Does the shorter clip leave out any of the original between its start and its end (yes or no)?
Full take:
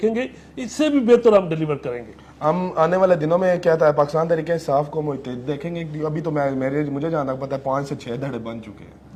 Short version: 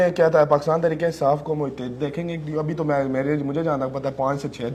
no